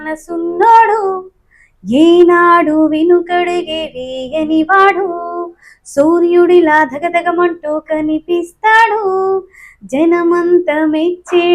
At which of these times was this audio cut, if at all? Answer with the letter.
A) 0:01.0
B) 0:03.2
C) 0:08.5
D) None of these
D